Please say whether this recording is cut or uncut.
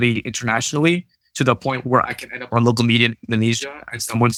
uncut